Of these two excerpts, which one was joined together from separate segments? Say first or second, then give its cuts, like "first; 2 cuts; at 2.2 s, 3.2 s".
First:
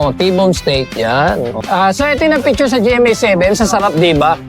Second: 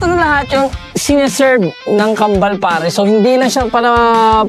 first; 1 cut; at 1.6 s